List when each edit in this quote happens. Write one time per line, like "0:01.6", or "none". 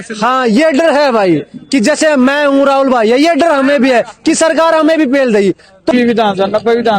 0:05.9